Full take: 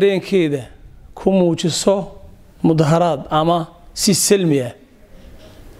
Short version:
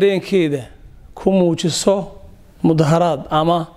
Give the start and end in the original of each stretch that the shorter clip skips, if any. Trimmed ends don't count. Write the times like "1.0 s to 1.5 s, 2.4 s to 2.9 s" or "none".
none